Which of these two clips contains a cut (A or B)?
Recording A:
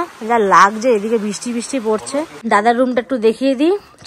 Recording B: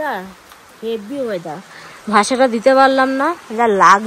A